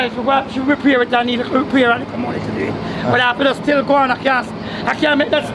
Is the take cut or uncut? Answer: uncut